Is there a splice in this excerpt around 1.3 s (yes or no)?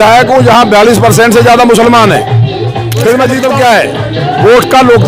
no